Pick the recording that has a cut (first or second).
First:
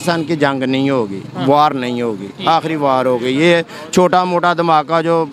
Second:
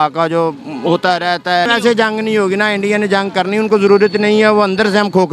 second